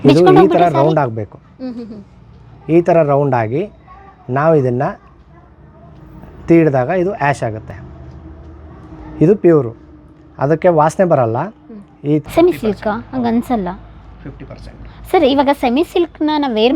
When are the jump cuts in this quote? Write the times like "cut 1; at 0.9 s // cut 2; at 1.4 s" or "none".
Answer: cut 1; at 12.2 s